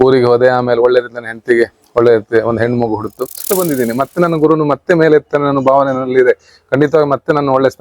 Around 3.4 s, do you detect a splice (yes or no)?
yes